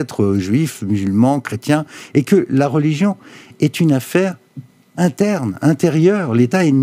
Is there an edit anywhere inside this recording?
no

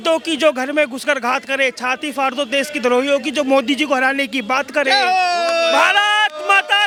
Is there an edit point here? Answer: no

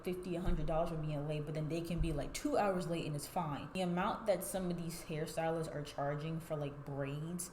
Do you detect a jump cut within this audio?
yes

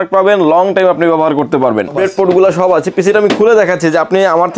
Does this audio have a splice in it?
yes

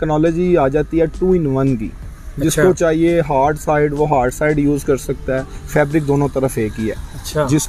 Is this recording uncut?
yes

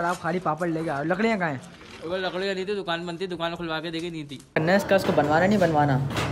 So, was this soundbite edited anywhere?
yes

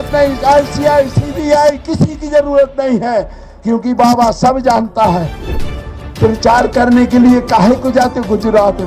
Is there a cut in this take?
yes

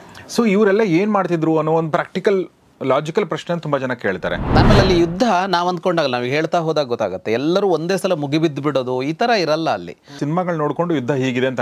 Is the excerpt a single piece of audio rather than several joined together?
no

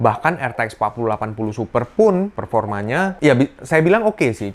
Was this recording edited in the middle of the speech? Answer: yes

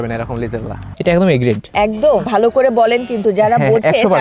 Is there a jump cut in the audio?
yes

